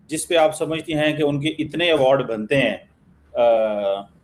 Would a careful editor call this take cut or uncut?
uncut